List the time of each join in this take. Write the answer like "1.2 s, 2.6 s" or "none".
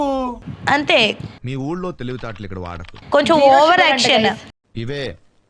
none